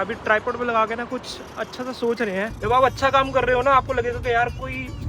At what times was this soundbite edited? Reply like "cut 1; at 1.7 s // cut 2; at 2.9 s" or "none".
cut 1; at 2.4 s